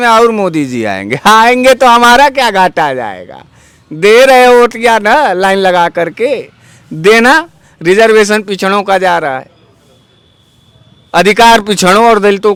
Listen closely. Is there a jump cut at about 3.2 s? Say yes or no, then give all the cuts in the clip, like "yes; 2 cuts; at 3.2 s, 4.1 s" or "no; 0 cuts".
no; 0 cuts